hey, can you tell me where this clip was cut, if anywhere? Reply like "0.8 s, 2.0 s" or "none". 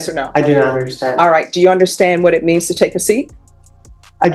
none